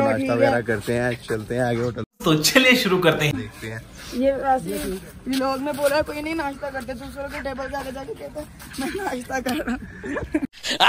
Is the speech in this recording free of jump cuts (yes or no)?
yes